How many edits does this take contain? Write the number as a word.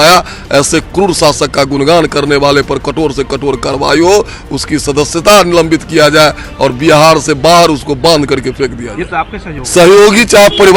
one